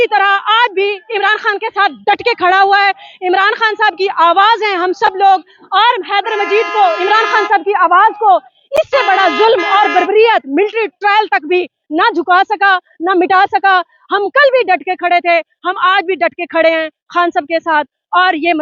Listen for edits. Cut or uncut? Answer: uncut